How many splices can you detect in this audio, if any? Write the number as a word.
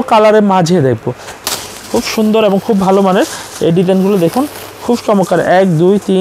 one